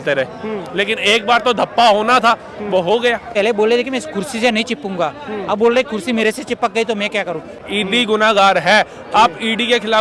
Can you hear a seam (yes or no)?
yes